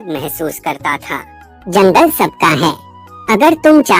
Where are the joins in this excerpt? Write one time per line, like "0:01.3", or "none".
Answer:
0:01.5